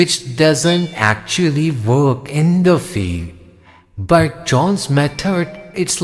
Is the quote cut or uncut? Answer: uncut